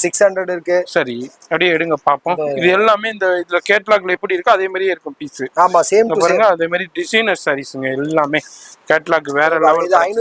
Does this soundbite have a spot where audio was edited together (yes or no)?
no